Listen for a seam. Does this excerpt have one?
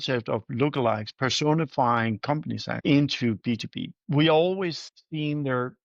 yes; 2 cuts; at 2.7 s, 3.9 s

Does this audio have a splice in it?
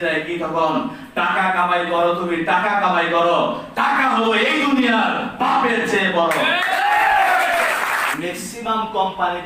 yes; 1 cut; at 8.1 s

